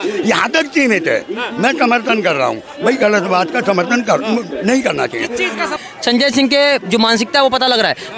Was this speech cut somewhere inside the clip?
yes; 1 cut; at 5.8 s

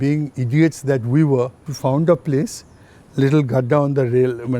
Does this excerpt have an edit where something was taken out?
yes; 1 cut; at 1.6 s

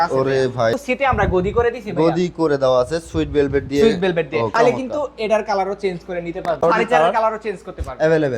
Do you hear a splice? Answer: yes; 3 cuts; at 0.8 s, 4.8 s, 6.6 s

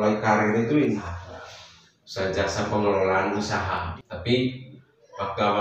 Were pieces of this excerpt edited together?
yes; 2 cuts; at 1.0 s, 3.7 s

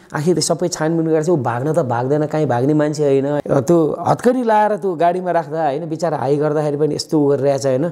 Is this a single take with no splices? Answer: no; 1 cut; at 3.4 s

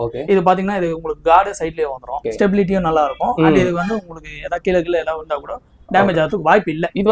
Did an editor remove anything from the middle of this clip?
yes; 1 cut; at 2.3 s

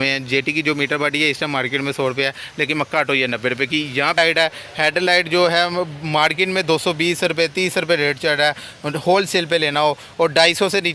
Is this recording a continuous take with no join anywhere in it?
no; 1 cut; at 4.2 s

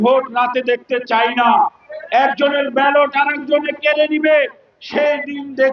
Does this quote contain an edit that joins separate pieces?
no; 0 cuts

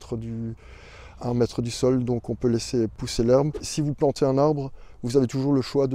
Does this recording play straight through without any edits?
no; 2 cuts; at 3.0 s, 3.7 s

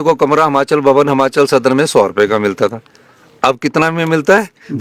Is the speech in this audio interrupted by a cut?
no; 0 cuts

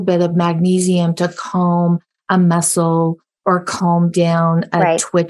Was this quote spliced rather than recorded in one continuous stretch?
no; 0 cuts

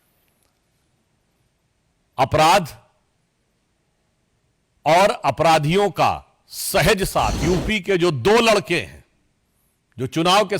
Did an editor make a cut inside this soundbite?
yes; 1 cut; at 7.4 s

